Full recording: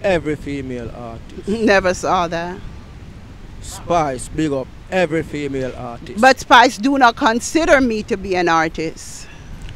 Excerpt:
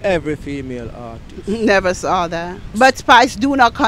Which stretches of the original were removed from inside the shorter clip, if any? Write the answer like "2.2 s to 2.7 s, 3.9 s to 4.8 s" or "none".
2.6 s to 6.0 s